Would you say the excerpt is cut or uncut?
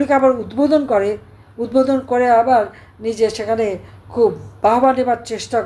uncut